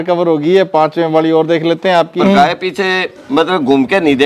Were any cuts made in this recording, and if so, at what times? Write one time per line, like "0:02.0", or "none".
0:02.2